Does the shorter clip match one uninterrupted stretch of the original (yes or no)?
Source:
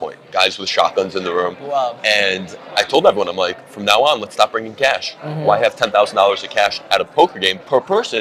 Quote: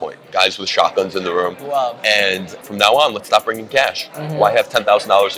no